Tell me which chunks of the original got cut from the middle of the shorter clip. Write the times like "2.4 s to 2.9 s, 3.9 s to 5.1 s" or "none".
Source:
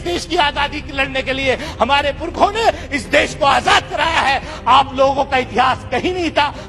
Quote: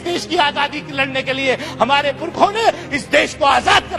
none

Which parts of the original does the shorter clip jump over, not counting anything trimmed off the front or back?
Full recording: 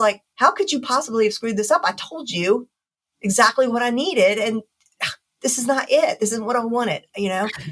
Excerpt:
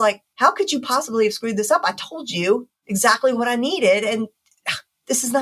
2.8 s to 3.1 s

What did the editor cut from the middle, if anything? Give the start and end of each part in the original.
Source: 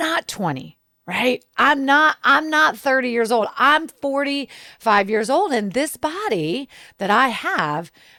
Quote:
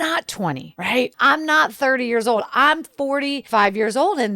1.1 s to 2.2 s, 4.4 s to 4.7 s

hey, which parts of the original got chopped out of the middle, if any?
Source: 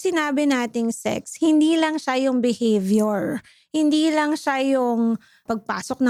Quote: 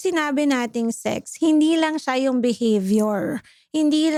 none

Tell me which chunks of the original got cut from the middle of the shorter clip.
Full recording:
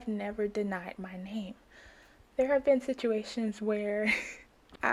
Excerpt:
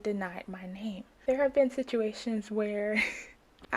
1.6 s to 2.2 s

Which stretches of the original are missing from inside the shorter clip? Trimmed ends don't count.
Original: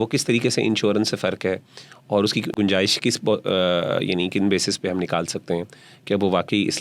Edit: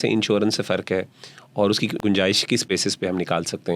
3.2 s to 4.5 s

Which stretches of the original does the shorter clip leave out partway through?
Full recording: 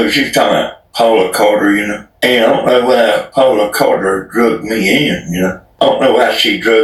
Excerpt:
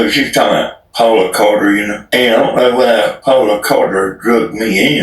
2.0 s to 2.1 s

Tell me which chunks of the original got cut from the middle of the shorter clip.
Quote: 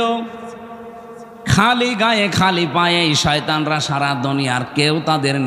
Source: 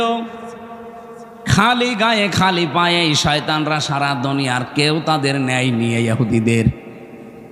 none

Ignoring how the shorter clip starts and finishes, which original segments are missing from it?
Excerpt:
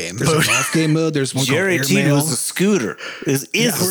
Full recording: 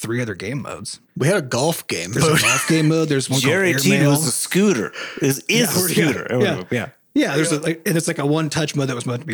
none

